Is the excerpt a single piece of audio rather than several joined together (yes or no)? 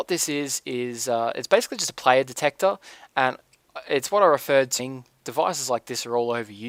yes